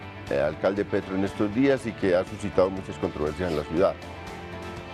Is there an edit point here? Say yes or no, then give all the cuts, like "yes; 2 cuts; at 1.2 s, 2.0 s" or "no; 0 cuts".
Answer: no; 0 cuts